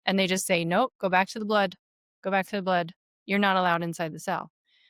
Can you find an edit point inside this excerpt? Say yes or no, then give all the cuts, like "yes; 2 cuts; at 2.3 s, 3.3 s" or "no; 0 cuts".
no; 0 cuts